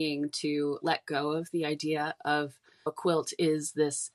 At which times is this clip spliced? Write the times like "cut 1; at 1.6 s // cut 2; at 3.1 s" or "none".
cut 1; at 2.9 s